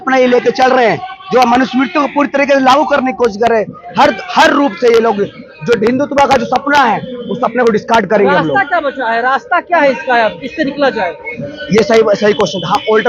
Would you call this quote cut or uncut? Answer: uncut